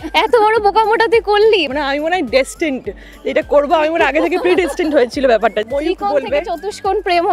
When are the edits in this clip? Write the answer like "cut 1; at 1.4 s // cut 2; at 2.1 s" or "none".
cut 1; at 1.7 s // cut 2; at 5.6 s

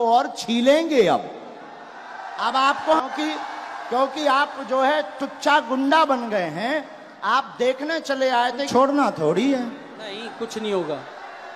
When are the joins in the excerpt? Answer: cut 1; at 3.0 s // cut 2; at 8.7 s

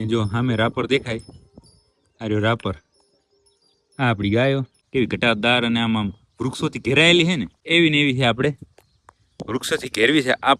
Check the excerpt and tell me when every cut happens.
cut 1; at 4.8 s // cut 2; at 7.5 s

